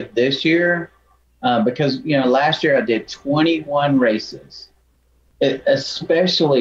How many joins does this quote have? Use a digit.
1